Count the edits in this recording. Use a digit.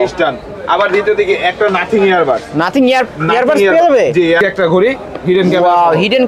1